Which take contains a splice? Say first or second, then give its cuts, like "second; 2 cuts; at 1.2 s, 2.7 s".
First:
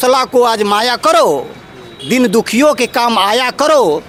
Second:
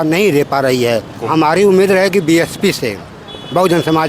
second; 1 cut; at 1.2 s